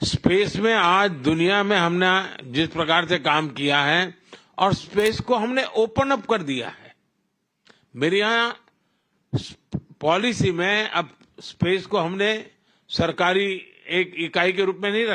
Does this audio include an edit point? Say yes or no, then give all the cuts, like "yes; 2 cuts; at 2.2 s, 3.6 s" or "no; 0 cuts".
no; 0 cuts